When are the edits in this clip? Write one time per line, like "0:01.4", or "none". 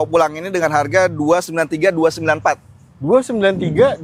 none